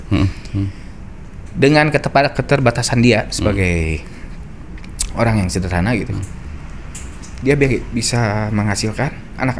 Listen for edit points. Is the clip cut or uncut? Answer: uncut